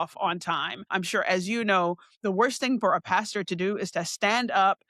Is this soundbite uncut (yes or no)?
no